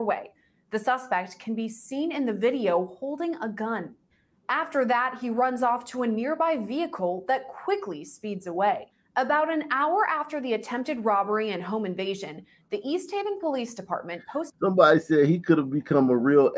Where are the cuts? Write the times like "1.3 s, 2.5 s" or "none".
none